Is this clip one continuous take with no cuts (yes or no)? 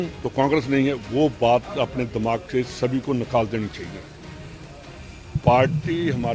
yes